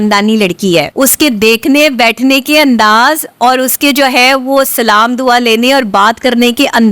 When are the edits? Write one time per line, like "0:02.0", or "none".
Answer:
0:00.9